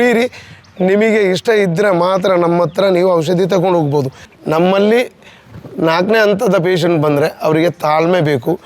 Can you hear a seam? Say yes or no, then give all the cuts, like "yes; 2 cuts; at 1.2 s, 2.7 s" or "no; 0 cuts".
yes; 1 cut; at 4.2 s